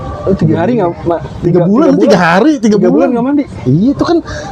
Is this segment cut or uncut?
uncut